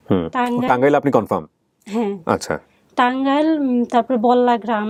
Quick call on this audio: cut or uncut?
uncut